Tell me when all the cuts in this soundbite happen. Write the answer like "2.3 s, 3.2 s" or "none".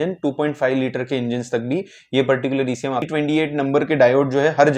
3.1 s